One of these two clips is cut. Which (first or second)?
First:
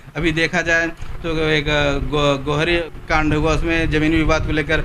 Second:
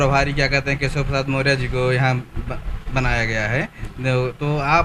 first